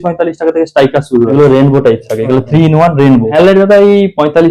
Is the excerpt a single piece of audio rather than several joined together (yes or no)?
no